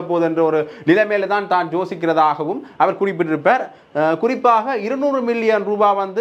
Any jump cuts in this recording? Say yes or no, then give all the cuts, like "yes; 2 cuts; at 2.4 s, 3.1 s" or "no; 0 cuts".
no; 0 cuts